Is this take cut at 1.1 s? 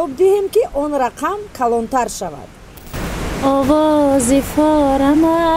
no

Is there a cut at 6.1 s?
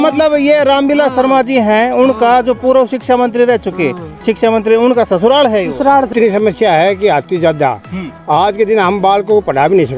yes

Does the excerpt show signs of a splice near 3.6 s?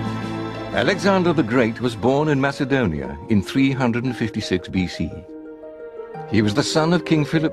yes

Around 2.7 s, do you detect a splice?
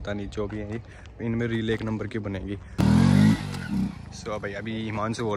yes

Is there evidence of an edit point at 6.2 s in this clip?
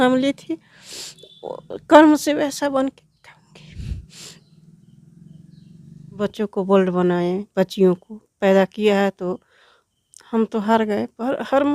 yes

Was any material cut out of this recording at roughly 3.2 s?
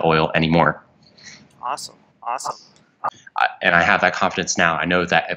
yes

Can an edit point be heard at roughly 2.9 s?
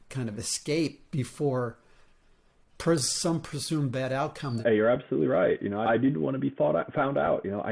no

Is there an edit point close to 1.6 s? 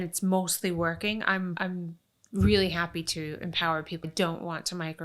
yes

